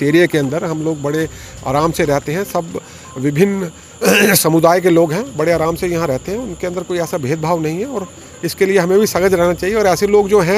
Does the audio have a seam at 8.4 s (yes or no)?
no